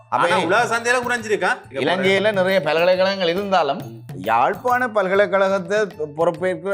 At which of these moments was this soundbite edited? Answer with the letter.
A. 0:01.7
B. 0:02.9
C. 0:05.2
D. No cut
A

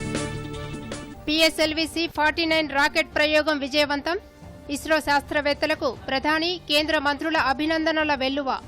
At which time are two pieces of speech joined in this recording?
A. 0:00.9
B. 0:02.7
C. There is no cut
A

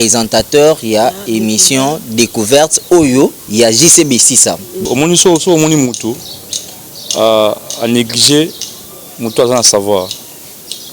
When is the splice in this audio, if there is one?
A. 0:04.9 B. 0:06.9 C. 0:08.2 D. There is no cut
A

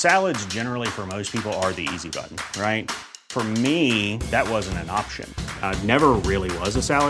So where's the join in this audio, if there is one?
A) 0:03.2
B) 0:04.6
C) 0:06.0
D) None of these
D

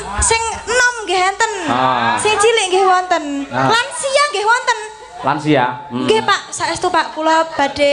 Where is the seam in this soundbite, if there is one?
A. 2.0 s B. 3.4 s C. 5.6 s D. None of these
D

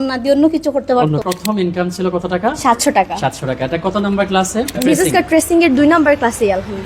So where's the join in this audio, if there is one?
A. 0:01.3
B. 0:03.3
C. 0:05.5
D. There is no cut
A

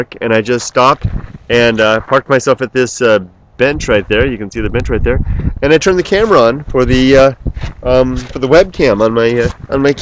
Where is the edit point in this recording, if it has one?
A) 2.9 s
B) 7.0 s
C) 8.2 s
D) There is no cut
C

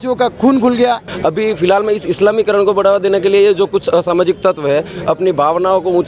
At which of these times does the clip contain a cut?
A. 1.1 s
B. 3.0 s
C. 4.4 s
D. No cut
A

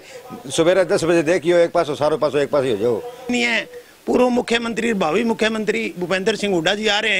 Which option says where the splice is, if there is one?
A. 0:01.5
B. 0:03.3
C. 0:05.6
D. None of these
B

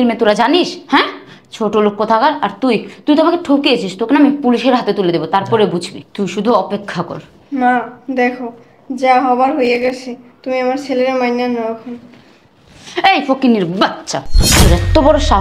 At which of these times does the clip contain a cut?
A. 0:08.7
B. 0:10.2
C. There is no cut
C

